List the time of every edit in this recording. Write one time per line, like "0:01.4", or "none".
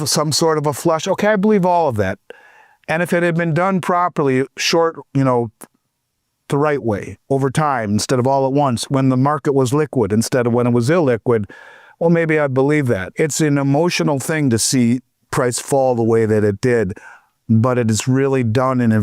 0:13.1